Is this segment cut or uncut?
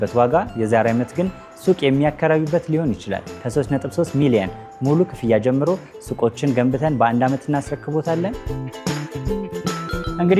uncut